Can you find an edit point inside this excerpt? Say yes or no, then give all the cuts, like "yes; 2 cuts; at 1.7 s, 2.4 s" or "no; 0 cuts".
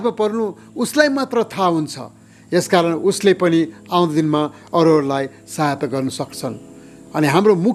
no; 0 cuts